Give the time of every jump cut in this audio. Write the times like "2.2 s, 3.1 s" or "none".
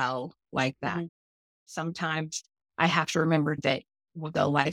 1.8 s, 3.6 s